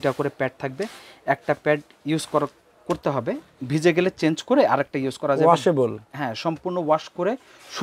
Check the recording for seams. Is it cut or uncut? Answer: cut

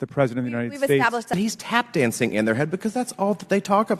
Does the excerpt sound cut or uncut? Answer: cut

